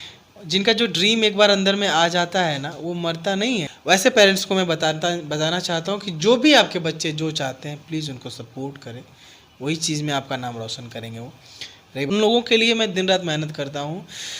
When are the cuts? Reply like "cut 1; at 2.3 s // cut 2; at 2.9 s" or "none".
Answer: cut 1; at 3.7 s // cut 2; at 12.1 s